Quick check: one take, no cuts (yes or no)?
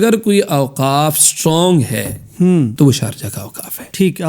no